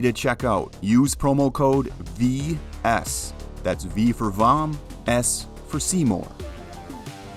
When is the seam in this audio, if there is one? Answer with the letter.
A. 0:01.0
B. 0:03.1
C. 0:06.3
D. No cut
C